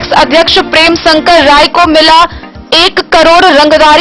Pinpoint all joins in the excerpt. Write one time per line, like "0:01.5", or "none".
none